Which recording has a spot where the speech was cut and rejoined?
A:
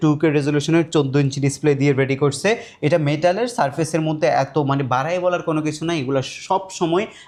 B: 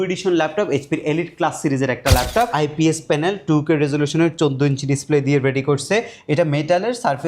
B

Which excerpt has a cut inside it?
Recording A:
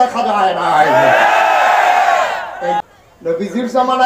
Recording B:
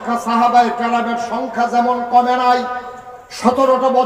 A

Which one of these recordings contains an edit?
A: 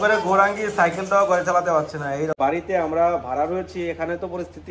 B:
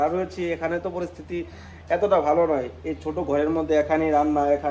A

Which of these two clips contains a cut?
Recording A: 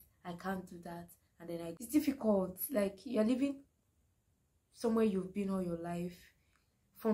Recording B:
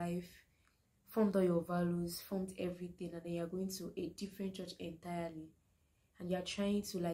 A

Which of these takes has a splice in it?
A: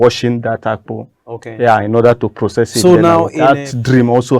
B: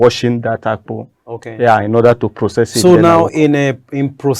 A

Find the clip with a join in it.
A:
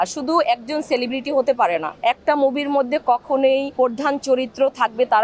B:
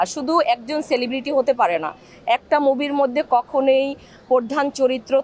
A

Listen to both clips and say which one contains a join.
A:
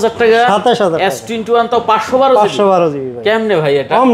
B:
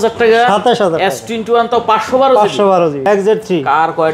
B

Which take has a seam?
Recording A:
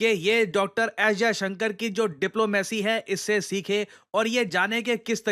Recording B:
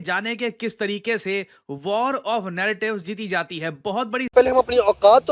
B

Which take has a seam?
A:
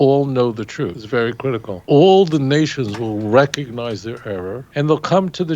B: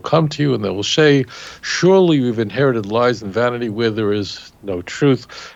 A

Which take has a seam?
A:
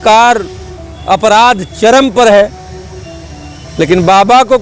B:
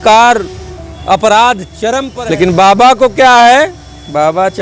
B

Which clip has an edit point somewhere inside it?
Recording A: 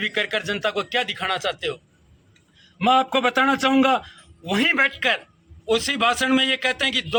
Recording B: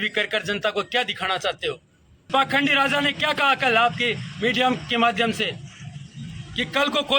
B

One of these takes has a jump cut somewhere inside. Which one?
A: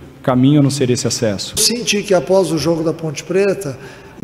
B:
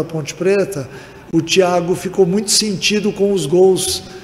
A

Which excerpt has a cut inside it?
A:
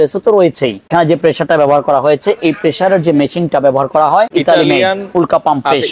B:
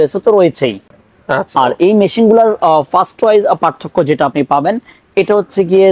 A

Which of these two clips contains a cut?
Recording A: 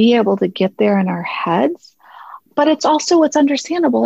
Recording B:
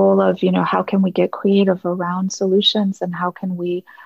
A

